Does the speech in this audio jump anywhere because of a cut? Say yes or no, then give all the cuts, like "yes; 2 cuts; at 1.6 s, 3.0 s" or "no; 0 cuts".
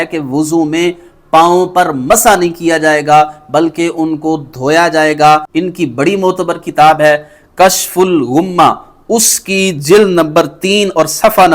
yes; 1 cut; at 5.5 s